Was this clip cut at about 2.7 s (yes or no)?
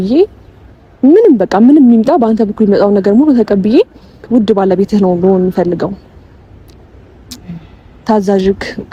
no